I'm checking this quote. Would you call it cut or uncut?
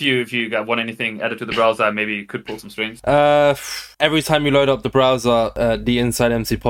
uncut